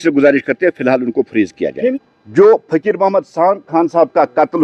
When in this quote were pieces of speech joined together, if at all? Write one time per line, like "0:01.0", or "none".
0:02.1

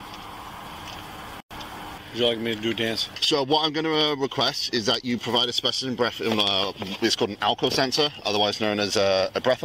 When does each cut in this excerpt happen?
0:02.0
0:03.1

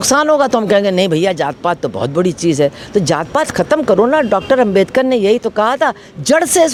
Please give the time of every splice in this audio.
none

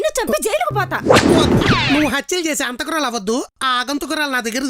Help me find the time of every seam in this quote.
none

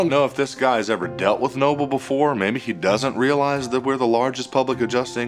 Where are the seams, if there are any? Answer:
none

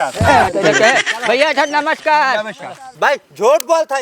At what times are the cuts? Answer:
0:02.9

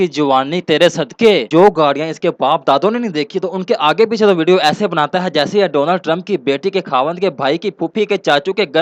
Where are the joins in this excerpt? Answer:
0:01.5

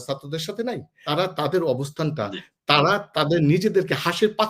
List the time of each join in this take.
0:00.9

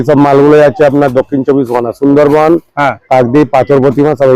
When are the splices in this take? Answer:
none

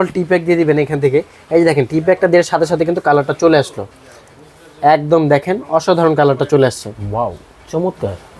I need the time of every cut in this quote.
none

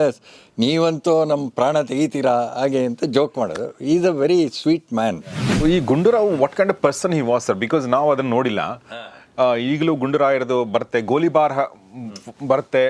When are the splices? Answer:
0:05.6

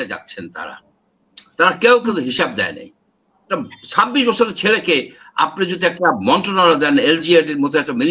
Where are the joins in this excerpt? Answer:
0:03.4

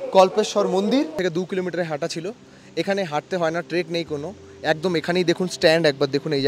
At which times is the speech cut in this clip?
0:01.2

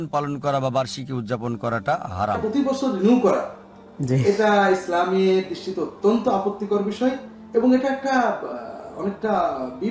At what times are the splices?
0:02.4

